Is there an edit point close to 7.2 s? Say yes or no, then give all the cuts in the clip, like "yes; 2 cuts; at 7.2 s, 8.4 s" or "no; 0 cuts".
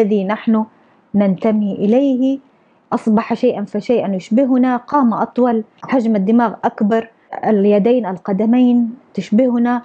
yes; 2 cuts; at 5.8 s, 7.2 s